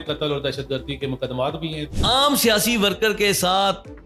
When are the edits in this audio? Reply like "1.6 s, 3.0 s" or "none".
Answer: 1.9 s